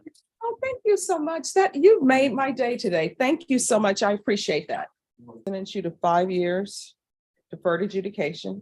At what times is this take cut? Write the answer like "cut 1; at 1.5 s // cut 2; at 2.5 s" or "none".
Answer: cut 1; at 5.4 s